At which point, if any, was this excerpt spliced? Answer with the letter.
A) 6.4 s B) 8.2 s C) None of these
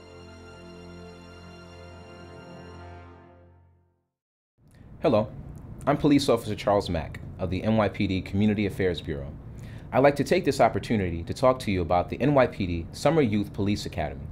C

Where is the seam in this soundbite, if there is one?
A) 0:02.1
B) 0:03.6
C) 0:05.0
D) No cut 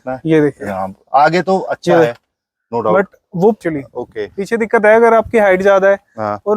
B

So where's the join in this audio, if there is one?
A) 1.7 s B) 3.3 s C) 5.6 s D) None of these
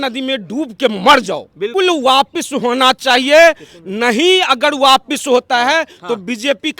A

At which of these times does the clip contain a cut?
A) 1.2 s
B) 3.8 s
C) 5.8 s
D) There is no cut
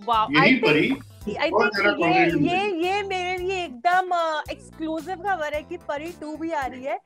D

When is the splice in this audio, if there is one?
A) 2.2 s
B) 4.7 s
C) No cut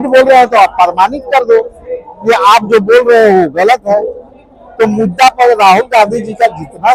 C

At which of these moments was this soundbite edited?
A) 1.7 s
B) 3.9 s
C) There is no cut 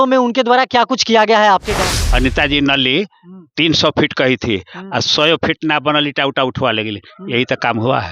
A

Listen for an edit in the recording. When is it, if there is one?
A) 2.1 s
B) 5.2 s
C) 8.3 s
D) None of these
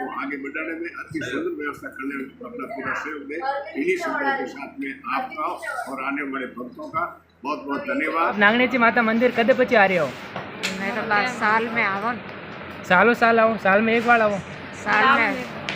C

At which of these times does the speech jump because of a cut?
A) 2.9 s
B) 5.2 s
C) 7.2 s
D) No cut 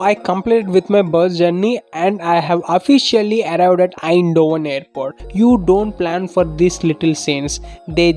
B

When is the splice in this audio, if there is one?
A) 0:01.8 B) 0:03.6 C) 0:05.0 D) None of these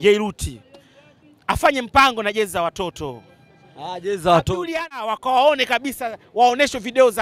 C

